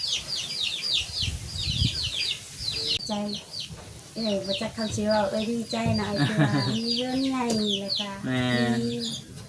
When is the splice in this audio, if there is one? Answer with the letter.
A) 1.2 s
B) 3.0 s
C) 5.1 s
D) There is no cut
B